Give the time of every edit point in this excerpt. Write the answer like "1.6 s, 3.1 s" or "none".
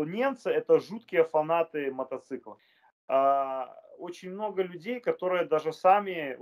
2.6 s

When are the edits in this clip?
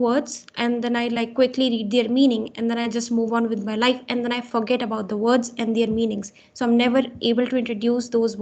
none

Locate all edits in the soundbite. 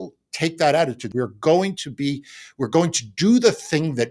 1.0 s

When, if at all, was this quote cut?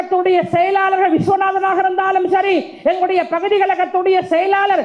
none

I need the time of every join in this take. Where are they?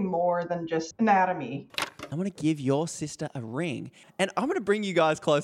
0.9 s, 1.7 s, 4.2 s

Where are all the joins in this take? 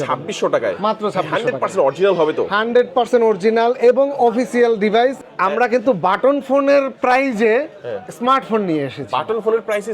5.2 s

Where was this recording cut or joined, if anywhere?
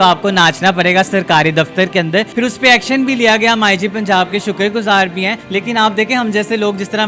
2.3 s, 5.4 s

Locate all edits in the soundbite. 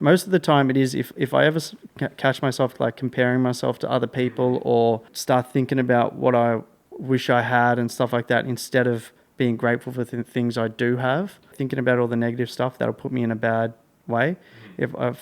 5.1 s, 11.6 s

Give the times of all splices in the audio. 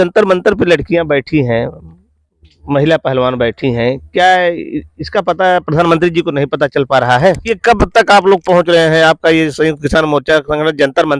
7.4 s

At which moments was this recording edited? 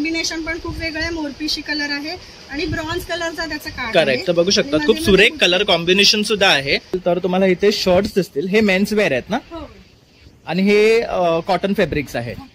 7.0 s

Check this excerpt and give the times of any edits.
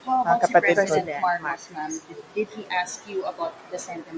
1.5 s

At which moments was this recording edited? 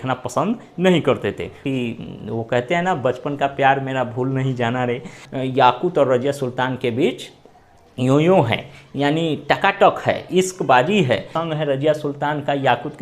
1.6 s, 5.2 s, 11.4 s

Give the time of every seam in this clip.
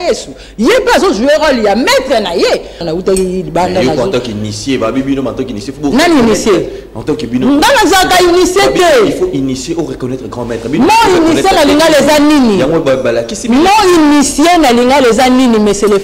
2.8 s

